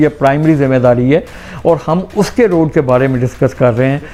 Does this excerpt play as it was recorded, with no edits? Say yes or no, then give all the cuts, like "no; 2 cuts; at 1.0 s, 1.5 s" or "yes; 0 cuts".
yes; 0 cuts